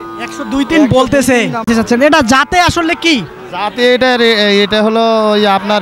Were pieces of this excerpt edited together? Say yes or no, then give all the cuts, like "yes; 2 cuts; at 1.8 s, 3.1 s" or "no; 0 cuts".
yes; 1 cut; at 1.6 s